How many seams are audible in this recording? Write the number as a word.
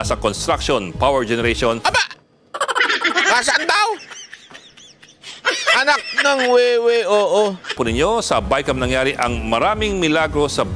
one